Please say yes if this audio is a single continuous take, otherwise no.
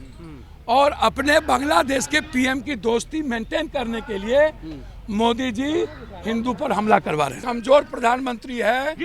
no